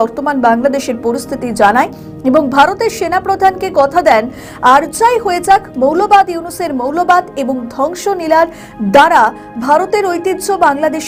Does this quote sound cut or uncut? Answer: uncut